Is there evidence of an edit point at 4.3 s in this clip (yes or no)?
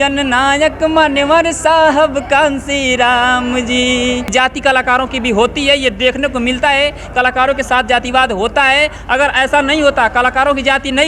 yes